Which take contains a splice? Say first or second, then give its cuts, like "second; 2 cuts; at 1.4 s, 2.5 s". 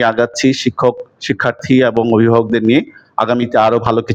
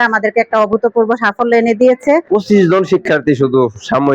second; 1 cut; at 2.2 s